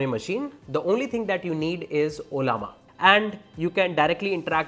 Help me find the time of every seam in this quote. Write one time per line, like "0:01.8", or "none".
0:02.8